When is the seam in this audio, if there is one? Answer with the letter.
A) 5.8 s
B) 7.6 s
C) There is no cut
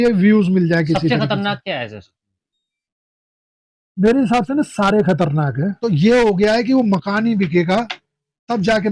A